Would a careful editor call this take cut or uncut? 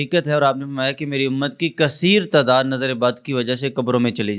uncut